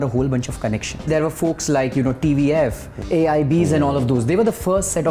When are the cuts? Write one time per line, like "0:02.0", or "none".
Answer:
0:01.1
0:03.1